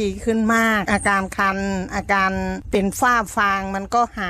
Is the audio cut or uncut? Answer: cut